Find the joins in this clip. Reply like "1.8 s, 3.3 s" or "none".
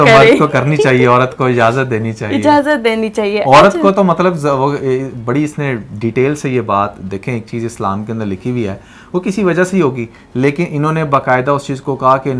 none